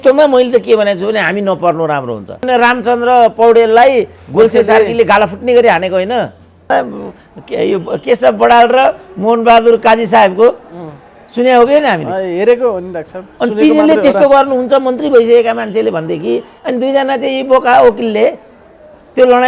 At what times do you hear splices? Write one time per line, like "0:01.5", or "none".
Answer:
0:02.5
0:06.7